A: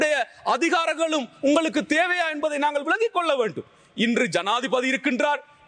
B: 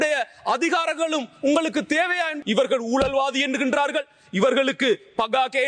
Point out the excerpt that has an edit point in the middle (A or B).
B